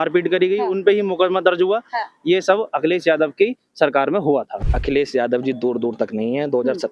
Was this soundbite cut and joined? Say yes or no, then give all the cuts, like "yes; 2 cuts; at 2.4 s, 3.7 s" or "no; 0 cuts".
yes; 1 cut; at 4.6 s